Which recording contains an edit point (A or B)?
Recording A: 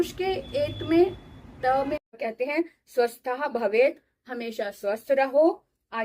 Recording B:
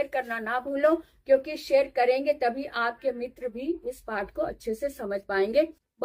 A